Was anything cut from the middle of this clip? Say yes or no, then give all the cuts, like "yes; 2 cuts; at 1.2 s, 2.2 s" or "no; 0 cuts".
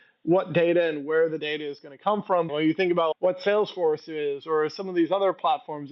yes; 1 cut; at 2.5 s